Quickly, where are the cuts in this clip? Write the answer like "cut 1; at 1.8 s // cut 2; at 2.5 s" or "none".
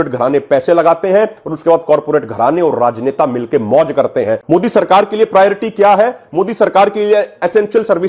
cut 1; at 4.4 s

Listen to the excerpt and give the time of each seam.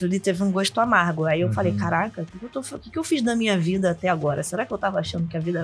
none

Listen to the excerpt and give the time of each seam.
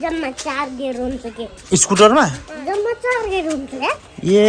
cut 1; at 2.5 s

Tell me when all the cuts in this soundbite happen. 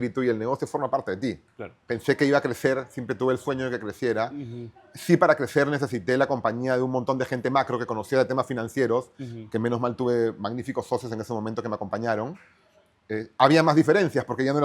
cut 1; at 1.8 s

